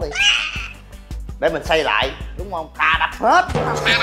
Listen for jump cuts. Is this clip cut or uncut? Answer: uncut